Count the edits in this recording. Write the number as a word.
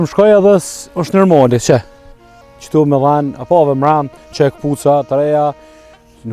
zero